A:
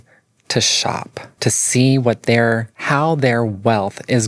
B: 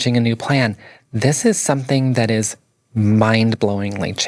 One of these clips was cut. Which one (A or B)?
A